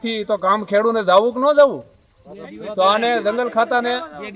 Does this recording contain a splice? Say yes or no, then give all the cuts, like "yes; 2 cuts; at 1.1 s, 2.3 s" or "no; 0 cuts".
no; 0 cuts